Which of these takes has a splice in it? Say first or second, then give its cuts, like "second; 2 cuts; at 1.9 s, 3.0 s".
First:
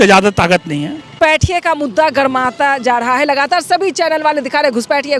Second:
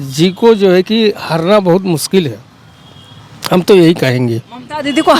first; 1 cut; at 1.1 s